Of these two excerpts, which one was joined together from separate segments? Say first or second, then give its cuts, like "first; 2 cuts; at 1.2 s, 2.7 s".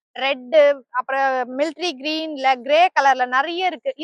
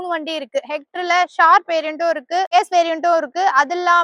second; 1 cut; at 2.5 s